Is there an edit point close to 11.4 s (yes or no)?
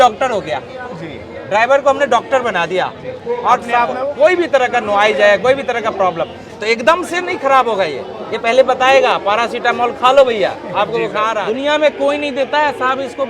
yes